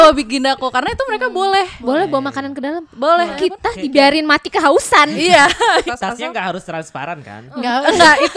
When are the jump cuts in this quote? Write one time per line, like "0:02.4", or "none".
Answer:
0:03.4
0:05.8

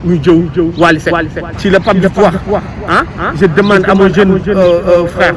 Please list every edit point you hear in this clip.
0:01.4

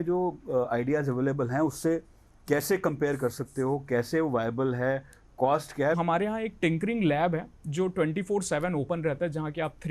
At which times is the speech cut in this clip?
0:06.0

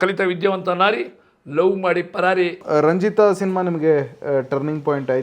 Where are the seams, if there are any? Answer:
0:02.6

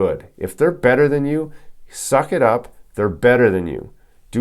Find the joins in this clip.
none

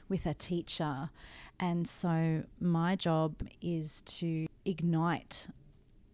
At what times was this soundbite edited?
0:03.5
0:04.5

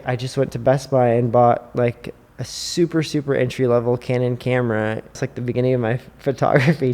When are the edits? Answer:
0:05.2

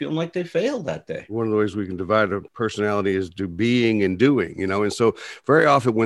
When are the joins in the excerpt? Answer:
0:01.2
0:02.5

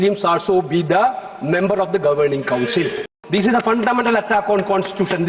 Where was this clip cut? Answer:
0:03.2

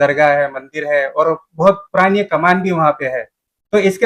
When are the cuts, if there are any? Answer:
none

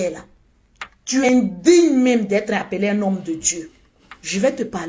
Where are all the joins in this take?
0:01.2

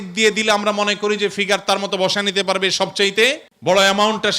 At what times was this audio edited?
0:03.5

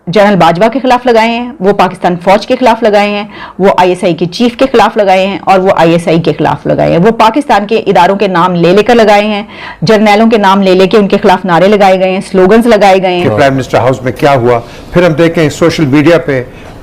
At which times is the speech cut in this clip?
0:13.2

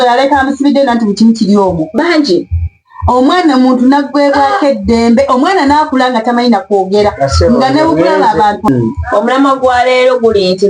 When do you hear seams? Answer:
0:08.7

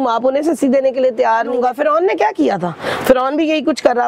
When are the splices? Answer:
0:01.5

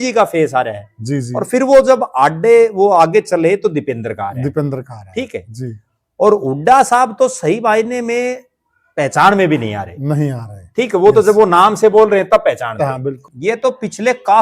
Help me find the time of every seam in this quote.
0:13.3

